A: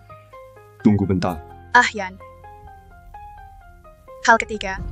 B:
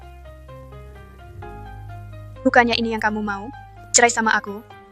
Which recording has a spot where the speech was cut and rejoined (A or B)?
B